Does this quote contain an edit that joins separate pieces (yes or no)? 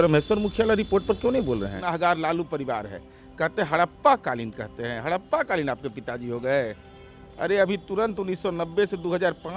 yes